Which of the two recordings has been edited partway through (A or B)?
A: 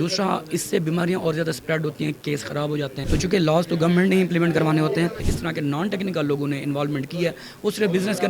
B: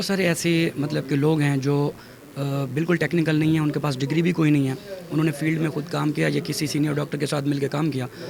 A